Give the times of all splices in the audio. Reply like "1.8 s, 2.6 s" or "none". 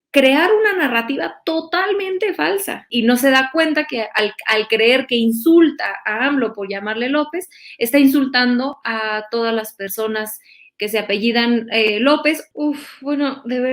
2.9 s, 12.5 s